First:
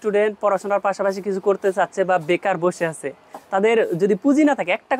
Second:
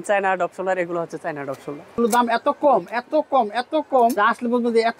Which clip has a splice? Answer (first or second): second